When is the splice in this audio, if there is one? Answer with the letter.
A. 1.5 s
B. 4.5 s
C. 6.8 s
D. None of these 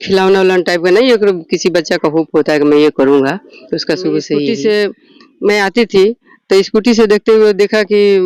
B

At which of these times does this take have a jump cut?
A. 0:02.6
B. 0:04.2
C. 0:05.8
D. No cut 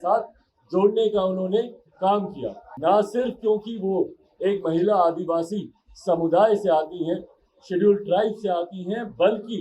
A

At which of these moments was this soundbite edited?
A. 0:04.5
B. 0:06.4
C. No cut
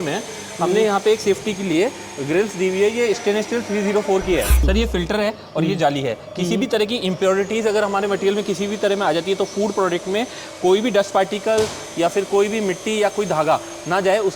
A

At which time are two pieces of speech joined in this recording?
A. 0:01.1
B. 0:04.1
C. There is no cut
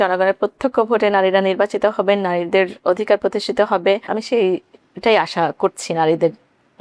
B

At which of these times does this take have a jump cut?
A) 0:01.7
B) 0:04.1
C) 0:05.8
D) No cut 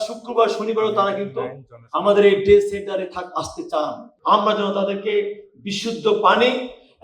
B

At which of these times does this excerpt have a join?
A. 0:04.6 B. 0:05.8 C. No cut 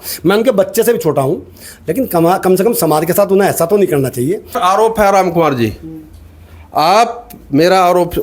A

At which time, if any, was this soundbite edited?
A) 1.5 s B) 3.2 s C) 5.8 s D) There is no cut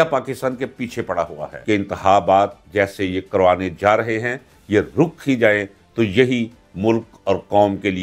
A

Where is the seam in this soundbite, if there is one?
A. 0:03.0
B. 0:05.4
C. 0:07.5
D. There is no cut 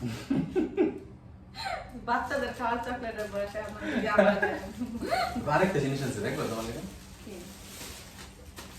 B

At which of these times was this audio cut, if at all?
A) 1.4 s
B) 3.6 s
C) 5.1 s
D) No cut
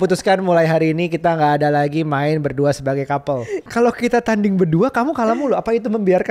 B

